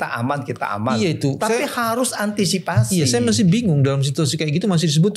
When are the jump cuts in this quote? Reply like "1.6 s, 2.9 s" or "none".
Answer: none